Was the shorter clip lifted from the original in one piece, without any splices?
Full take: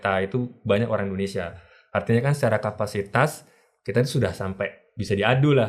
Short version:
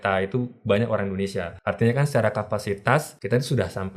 no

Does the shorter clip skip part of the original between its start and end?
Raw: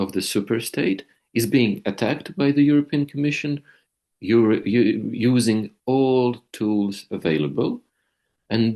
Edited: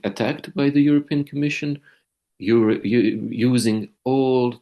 no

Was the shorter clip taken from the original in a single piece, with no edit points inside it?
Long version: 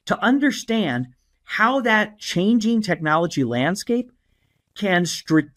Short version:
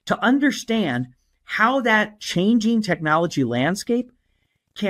yes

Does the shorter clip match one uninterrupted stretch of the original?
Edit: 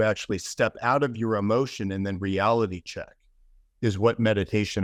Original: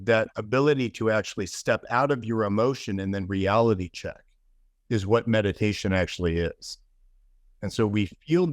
yes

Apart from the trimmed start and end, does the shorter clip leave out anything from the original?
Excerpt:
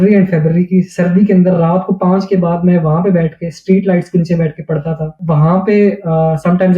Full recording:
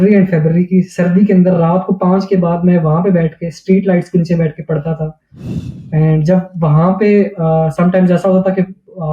yes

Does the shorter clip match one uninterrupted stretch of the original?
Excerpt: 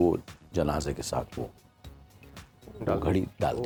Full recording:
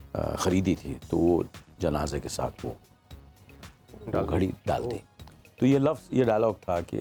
yes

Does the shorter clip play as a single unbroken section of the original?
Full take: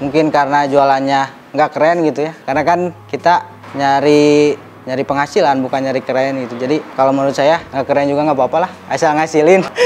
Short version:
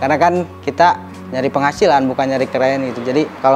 no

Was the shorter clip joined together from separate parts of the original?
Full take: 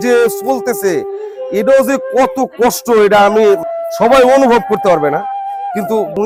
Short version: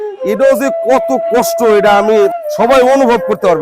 yes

